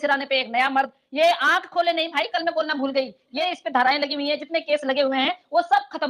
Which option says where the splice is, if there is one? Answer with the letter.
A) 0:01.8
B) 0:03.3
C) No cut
B